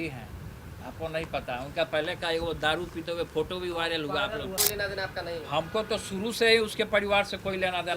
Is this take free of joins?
no; 1 cut; at 4.5 s

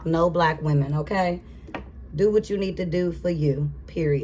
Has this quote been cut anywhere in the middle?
no; 0 cuts

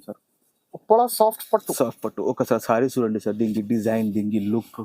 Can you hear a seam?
no; 0 cuts

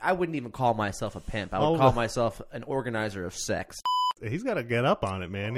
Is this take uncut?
no; 1 cut; at 3.8 s

